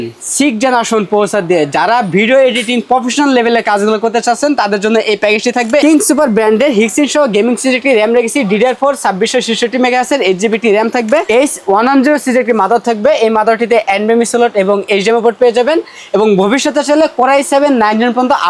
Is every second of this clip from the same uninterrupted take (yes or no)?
no